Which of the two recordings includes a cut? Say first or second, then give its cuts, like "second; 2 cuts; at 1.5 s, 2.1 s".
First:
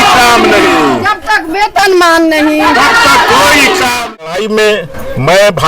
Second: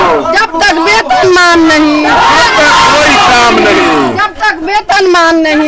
first; 1 cut; at 4.2 s